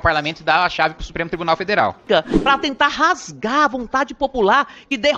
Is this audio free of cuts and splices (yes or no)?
no